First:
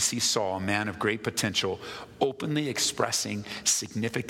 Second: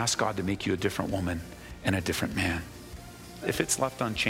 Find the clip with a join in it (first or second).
second